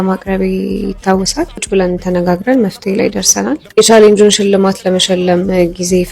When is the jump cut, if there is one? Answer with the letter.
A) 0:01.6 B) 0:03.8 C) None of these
A